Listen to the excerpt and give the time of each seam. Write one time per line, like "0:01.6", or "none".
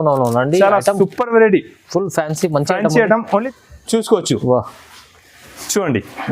0:03.5